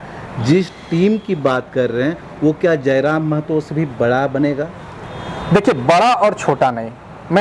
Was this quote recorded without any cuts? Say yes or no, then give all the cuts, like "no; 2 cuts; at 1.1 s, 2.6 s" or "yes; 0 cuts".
yes; 0 cuts